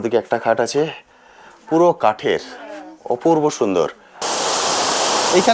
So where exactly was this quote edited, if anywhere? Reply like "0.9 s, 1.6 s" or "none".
4.2 s